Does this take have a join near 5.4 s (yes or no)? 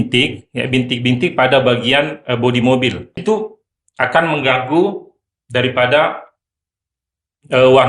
no